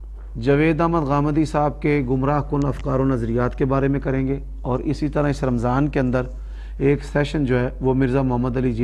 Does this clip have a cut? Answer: no; 0 cuts

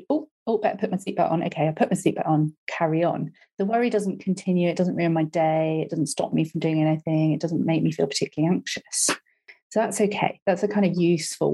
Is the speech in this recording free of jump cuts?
yes; 0 cuts

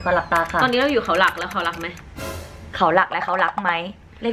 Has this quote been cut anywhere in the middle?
no; 0 cuts

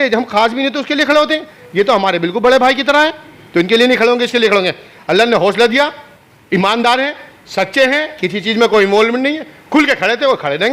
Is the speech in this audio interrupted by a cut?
no; 0 cuts

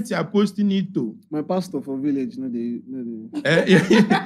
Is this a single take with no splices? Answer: yes; 0 cuts

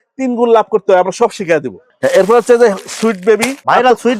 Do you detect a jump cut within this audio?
no; 0 cuts

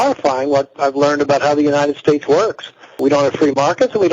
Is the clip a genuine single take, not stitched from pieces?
no; 1 cut; at 3.0 s

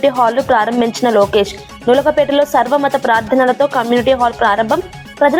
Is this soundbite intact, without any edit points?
yes; 0 cuts

